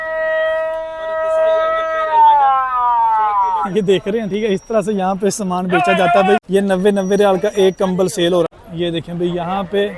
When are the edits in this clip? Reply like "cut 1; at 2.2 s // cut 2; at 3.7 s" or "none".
cut 1; at 6.4 s // cut 2; at 8.5 s